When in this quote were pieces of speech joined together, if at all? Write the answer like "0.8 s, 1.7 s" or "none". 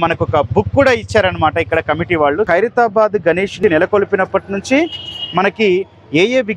2.5 s